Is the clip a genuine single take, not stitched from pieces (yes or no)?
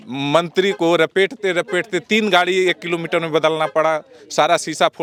yes